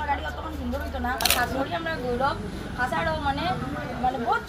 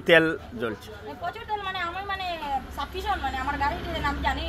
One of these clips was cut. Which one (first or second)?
first